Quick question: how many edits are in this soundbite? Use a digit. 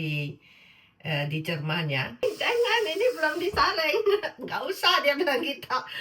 1